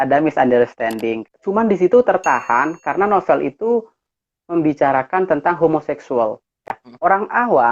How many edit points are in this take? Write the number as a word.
two